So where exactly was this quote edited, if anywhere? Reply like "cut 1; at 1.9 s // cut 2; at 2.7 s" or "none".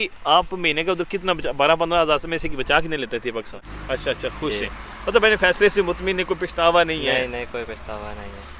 cut 1; at 3.6 s